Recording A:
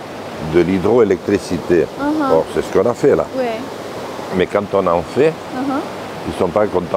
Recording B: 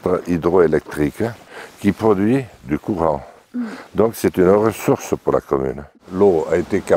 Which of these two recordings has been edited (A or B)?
B